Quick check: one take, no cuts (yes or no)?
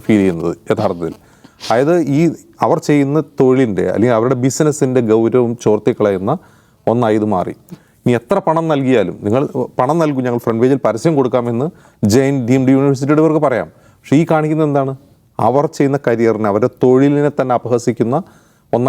yes